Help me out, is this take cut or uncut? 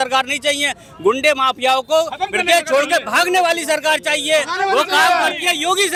uncut